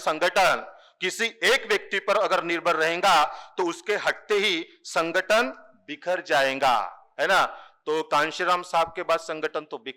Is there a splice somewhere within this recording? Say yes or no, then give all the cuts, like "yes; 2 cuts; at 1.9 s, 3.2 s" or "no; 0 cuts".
no; 0 cuts